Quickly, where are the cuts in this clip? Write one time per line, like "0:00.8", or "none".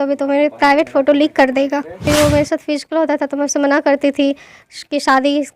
0:02.0